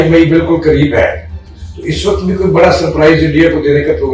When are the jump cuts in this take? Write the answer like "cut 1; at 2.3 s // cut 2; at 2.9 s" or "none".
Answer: none